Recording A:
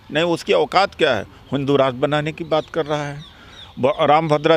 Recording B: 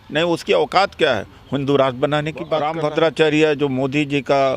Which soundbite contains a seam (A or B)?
B